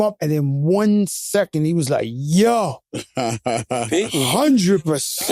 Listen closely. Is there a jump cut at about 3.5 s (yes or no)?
no